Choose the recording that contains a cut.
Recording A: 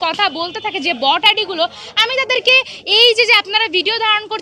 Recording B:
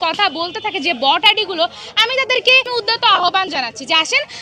B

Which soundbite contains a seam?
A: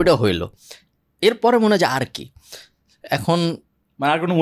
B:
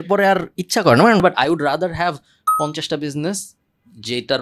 B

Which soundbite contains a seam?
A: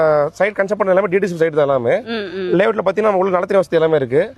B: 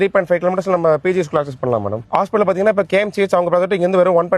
B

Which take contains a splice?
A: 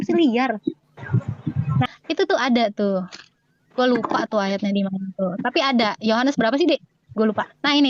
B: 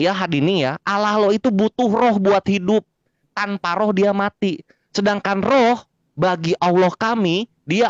A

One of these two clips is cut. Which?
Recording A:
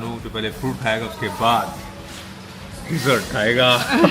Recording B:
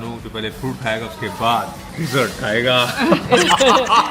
B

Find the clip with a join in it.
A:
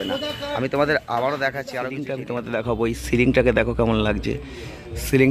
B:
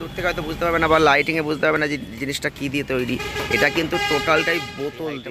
A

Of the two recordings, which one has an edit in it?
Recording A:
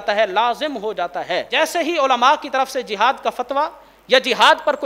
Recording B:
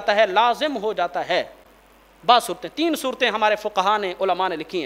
A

